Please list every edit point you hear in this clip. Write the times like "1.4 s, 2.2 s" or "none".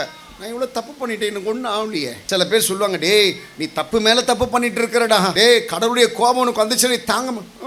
2.2 s, 5.3 s

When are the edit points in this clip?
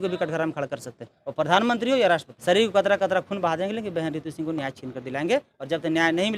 2.3 s

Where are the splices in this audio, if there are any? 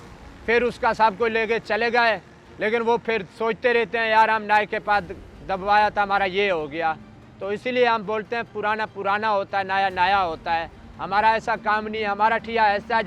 none

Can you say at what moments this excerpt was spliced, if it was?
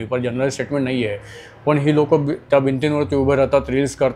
none

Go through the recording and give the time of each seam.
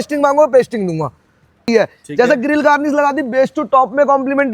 1.6 s

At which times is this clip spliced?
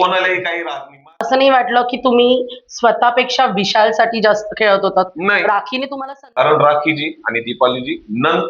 1.2 s, 5.9 s

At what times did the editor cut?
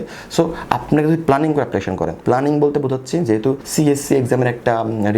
2.2 s, 3.6 s

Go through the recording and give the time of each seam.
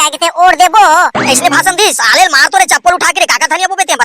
1.2 s

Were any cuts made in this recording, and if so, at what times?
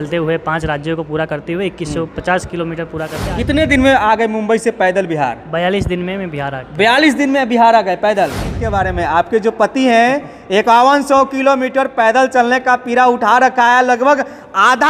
3.3 s, 8.6 s

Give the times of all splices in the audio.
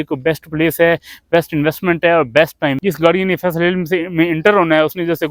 2.8 s

